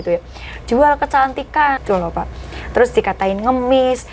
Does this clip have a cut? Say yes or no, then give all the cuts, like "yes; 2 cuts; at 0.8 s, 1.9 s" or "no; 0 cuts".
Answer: yes; 1 cut; at 1.8 s